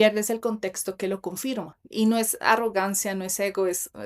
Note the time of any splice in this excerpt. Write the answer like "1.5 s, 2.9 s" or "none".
1.8 s